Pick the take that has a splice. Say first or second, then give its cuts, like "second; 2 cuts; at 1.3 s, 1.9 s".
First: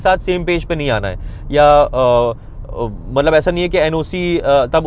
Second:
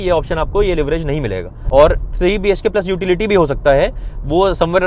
second; 1 cut; at 1.5 s